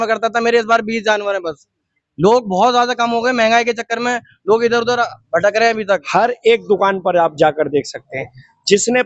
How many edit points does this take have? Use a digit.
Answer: 1